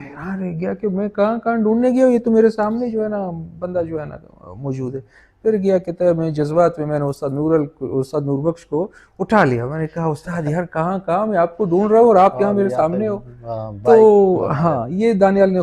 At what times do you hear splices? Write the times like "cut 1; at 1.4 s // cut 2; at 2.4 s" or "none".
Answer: none